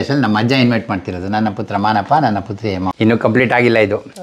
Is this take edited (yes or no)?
yes